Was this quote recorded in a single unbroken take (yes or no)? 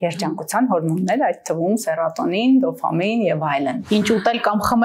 no